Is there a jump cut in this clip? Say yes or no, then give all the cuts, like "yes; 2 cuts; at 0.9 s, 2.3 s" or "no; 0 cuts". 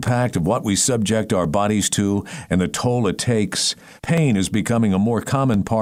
no; 0 cuts